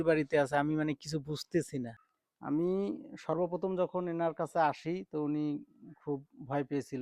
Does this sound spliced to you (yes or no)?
yes